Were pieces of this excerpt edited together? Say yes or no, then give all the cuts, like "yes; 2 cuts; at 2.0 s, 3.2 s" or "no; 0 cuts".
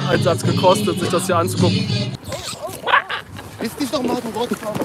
yes; 1 cut; at 2.1 s